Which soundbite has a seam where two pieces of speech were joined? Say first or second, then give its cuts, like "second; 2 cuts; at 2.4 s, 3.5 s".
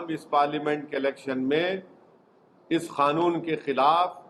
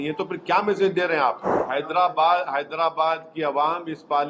second; 1 cut; at 1.5 s